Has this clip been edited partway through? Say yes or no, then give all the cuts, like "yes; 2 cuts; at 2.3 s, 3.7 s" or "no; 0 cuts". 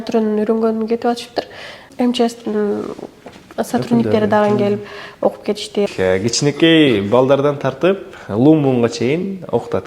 yes; 2 cuts; at 1.8 s, 5.9 s